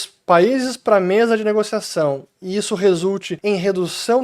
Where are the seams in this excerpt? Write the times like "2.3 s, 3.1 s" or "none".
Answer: 3.3 s